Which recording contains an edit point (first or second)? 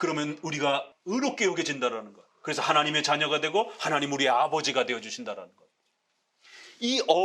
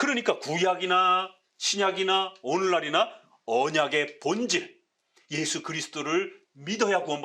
first